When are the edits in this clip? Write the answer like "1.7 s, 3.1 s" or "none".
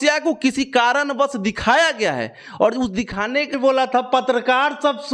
3.5 s